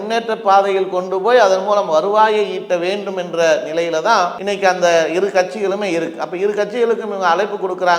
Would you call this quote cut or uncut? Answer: uncut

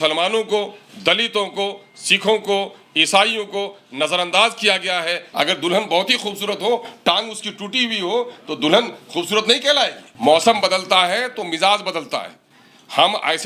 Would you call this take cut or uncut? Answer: cut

